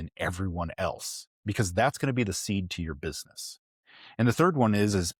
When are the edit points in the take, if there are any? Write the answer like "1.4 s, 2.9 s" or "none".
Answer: none